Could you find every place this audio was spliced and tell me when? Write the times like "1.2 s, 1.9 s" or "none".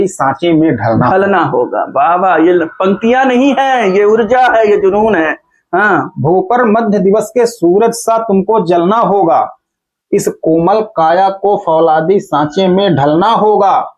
none

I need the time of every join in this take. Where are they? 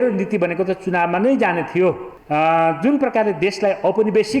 2.1 s

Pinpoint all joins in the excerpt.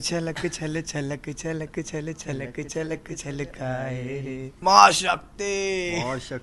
4.5 s

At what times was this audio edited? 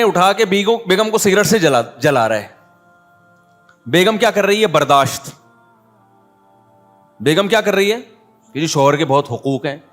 5.6 s, 7.1 s

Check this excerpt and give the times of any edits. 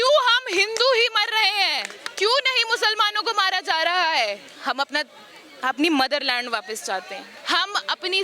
2.0 s, 4.5 s, 7.3 s

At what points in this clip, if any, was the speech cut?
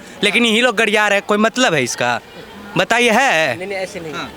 none

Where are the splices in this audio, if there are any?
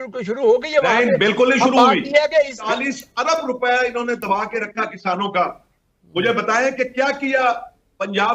2.6 s

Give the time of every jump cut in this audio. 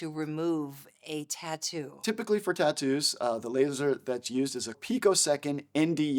2.0 s, 4.8 s

